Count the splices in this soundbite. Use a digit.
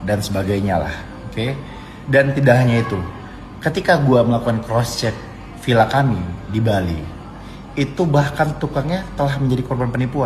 1